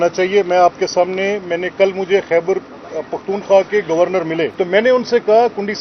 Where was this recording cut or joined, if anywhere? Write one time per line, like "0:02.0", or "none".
0:04.5

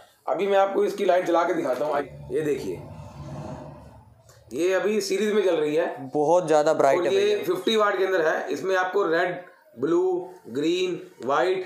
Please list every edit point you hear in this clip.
0:02.0

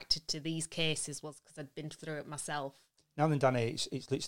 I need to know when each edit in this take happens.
0:02.9

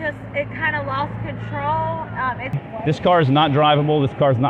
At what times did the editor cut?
0:02.6

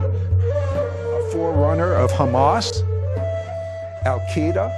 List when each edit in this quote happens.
0:02.7

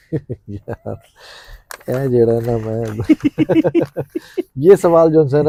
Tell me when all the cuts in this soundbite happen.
none

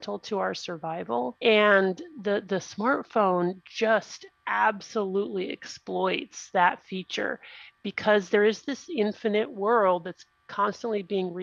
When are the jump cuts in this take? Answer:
0:01.3

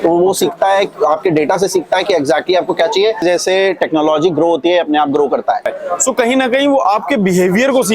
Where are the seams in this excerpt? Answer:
0:03.2
0:05.7

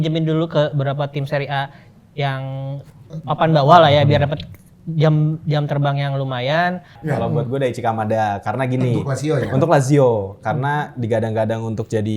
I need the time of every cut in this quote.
0:07.0

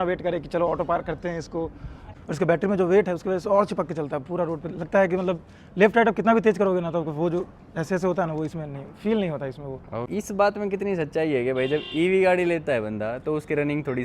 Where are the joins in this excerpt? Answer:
0:02.1
0:10.1

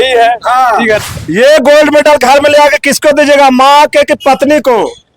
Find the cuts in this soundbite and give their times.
0:01.0

